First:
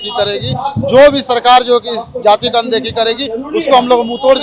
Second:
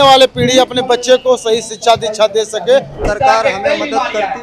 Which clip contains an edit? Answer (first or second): second